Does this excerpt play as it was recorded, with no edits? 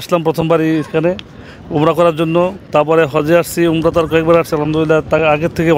yes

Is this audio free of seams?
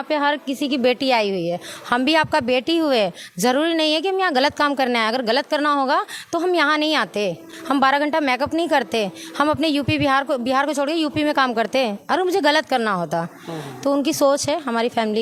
yes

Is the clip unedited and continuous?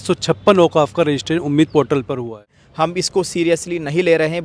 no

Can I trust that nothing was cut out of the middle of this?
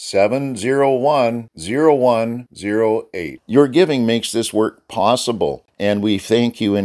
no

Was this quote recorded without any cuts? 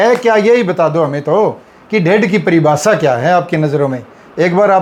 yes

